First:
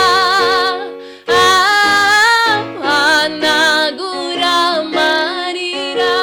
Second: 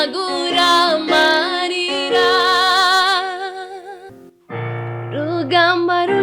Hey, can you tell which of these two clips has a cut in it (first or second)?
second